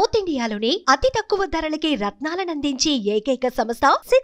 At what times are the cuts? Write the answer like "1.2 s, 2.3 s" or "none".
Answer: none